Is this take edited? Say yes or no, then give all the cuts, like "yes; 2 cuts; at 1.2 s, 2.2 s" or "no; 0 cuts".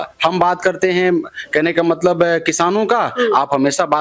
no; 0 cuts